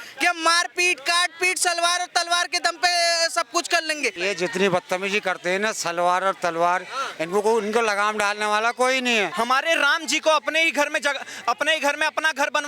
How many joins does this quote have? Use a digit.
2